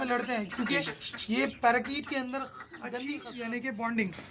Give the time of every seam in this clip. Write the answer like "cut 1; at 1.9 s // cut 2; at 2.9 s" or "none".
cut 1; at 3.2 s

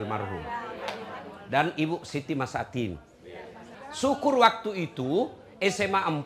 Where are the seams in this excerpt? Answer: cut 1; at 3.7 s

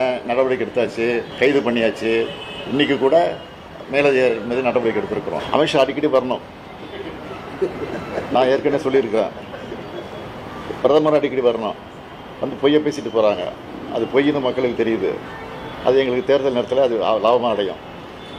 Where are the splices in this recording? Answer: cut 1; at 1.3 s // cut 2; at 5.4 s

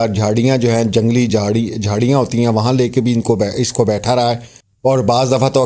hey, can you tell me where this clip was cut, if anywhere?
none

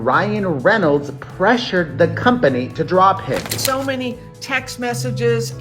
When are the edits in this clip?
cut 1; at 3.5 s

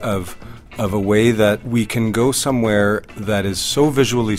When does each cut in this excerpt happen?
cut 1; at 1.6 s

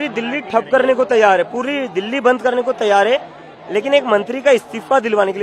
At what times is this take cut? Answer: none

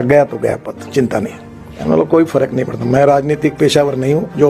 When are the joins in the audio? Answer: cut 1; at 1.7 s

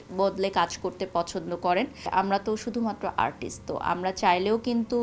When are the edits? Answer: cut 1; at 2.1 s

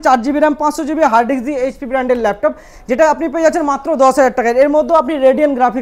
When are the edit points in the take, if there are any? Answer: none

